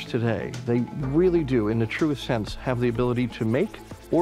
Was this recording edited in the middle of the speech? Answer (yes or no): no